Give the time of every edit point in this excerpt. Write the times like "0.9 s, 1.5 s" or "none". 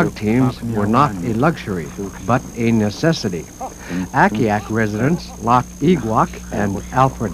none

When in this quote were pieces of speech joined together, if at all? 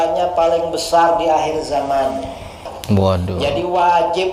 2.7 s

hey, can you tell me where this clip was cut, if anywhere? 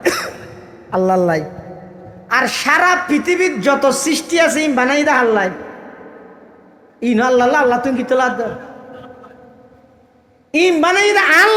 none

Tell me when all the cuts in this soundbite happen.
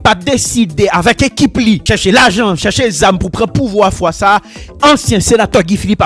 1.8 s

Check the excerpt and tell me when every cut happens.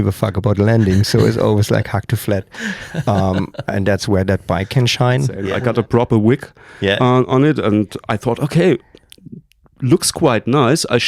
5.4 s

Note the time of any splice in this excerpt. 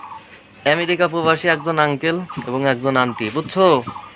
none

